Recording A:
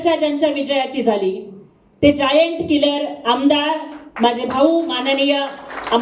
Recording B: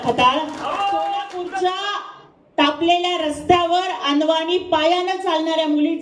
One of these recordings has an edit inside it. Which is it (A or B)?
B